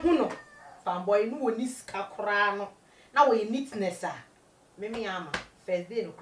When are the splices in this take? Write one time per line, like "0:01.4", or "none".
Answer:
none